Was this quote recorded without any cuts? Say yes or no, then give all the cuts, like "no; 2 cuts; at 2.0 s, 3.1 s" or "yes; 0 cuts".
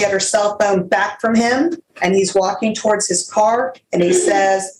no; 1 cut; at 1.9 s